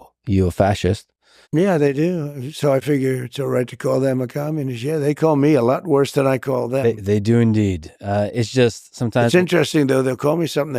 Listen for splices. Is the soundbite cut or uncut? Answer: uncut